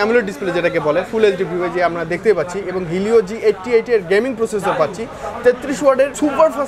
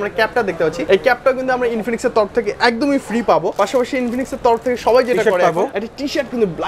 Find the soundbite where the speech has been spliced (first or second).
second